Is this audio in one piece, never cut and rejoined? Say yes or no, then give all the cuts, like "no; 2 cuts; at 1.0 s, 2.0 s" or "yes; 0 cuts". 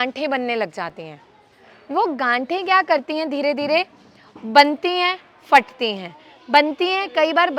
yes; 0 cuts